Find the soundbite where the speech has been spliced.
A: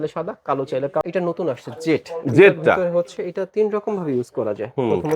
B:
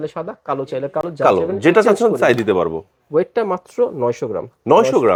A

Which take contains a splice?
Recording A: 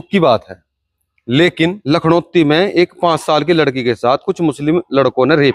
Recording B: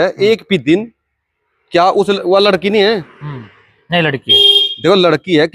A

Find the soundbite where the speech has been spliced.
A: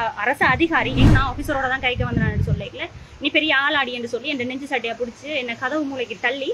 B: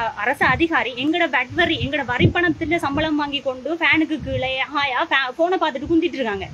A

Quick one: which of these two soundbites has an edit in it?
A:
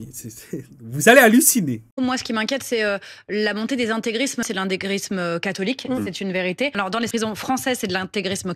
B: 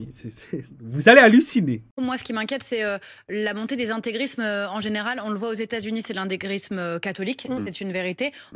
A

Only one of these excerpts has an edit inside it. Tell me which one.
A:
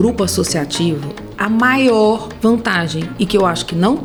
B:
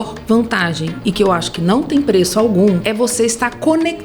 B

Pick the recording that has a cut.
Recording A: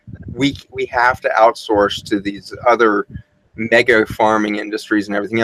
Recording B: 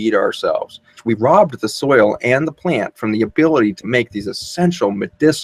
B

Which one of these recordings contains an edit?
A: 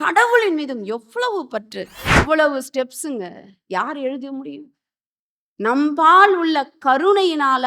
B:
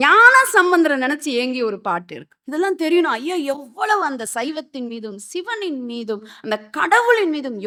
A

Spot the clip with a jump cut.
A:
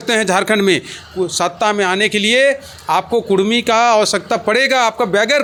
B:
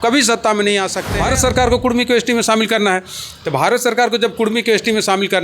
B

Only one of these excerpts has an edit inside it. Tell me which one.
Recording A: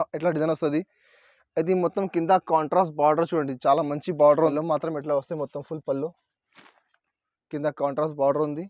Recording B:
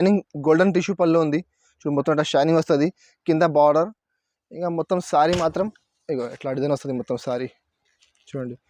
A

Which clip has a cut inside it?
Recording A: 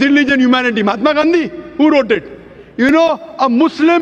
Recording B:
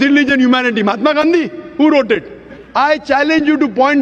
B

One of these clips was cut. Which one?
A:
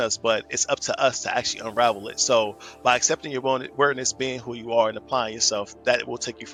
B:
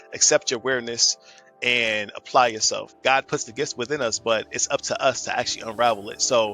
B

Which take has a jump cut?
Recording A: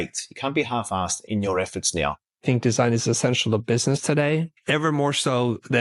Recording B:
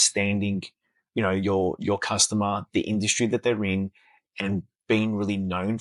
A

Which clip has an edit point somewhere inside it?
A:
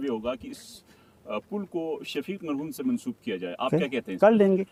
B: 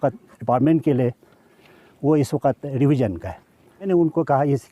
B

